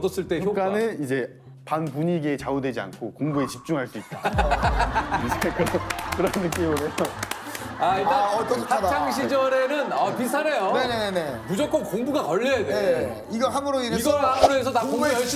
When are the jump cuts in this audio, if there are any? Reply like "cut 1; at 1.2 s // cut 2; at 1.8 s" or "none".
none